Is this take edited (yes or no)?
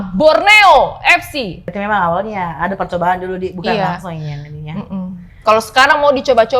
yes